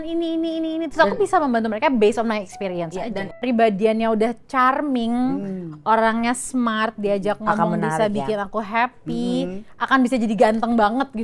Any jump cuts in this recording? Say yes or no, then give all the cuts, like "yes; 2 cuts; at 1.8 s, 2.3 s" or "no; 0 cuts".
yes; 1 cut; at 3.4 s